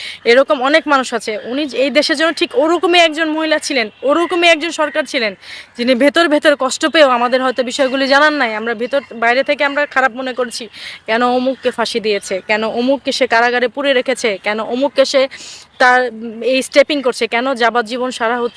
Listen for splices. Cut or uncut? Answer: uncut